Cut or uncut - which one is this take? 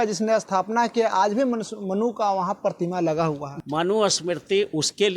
cut